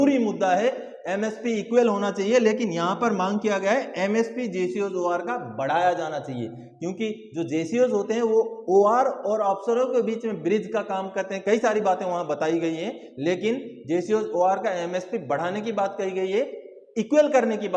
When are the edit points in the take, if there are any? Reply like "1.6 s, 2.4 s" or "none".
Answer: none